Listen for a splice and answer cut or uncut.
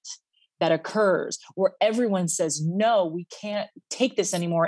uncut